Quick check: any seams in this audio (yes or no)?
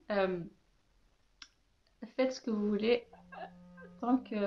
no